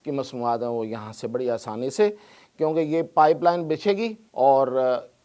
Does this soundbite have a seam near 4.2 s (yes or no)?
yes